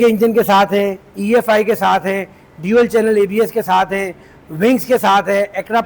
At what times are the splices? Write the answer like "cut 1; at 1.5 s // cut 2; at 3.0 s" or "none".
none

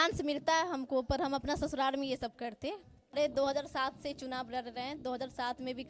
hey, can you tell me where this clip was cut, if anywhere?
cut 1; at 3.1 s

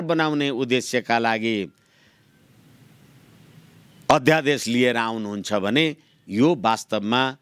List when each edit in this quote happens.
none

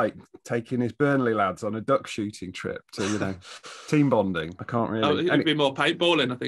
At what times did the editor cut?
cut 1; at 4.5 s

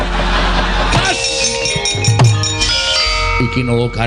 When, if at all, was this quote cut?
cut 1; at 0.9 s // cut 2; at 2.7 s

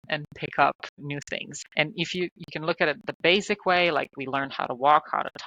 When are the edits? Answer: cut 1; at 1.1 s

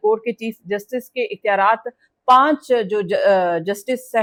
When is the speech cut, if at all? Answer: none

